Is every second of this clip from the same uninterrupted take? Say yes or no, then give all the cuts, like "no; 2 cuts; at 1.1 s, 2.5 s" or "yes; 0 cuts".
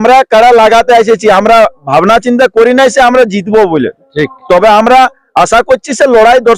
yes; 0 cuts